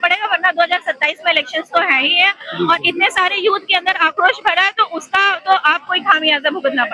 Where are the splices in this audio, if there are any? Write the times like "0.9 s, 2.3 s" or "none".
none